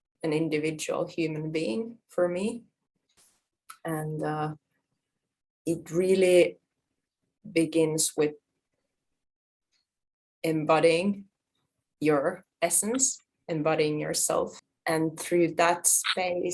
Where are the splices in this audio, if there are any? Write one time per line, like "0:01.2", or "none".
0:14.7

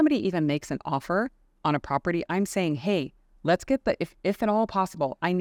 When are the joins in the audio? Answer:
none

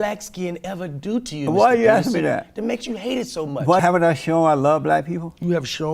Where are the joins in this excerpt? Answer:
0:03.8

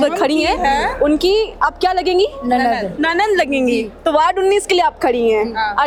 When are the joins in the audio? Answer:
none

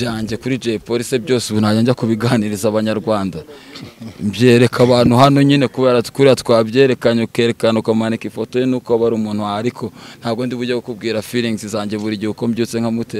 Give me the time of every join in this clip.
none

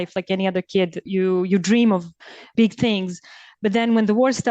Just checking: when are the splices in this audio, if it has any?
0:01.0
0:02.5

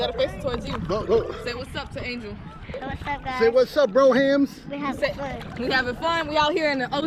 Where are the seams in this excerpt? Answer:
none

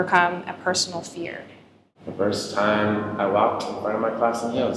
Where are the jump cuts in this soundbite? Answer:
none

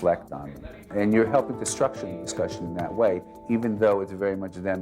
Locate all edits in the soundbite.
0:00.9

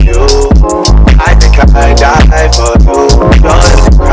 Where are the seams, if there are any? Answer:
none

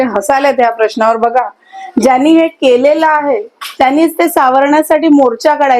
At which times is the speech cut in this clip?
none

